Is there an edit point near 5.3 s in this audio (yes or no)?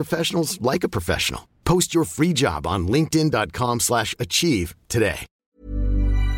yes